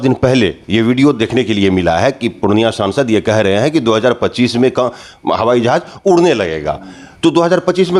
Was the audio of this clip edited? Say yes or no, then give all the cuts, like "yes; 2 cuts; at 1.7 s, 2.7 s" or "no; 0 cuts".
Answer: no; 0 cuts